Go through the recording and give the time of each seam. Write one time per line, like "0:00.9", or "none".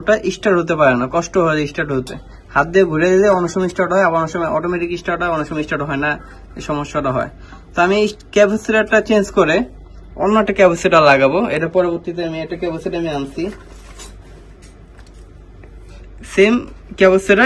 none